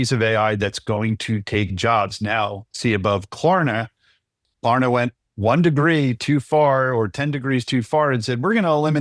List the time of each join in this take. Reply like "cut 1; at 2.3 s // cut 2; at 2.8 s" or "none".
none